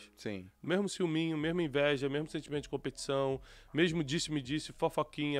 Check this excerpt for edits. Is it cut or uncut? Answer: uncut